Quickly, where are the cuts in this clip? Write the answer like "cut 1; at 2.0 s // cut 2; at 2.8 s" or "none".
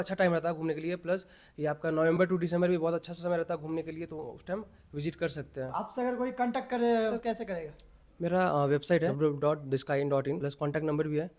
cut 1; at 5.7 s // cut 2; at 7.2 s // cut 3; at 9.1 s // cut 4; at 10.5 s